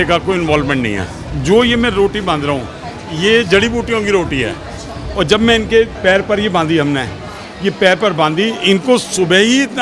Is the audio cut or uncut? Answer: cut